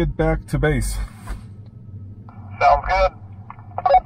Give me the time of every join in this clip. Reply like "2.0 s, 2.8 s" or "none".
none